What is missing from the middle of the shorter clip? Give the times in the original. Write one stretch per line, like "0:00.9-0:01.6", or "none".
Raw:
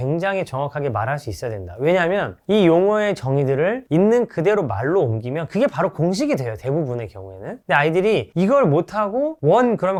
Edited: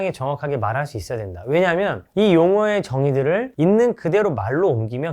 none